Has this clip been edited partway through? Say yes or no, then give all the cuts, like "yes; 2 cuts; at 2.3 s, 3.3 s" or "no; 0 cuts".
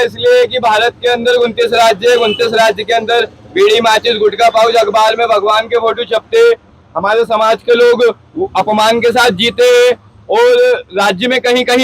no; 0 cuts